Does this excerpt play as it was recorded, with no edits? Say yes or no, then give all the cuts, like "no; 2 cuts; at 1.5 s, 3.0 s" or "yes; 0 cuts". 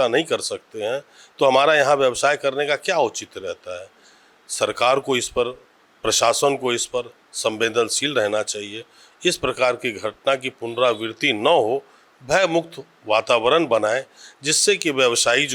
yes; 0 cuts